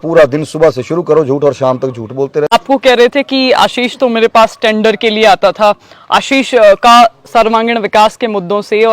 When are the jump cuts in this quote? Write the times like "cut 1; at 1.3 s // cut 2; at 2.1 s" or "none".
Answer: cut 1; at 2.5 s